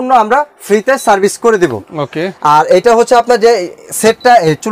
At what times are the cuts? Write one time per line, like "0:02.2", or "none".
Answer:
none